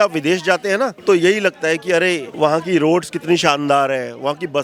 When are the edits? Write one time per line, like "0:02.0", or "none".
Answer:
none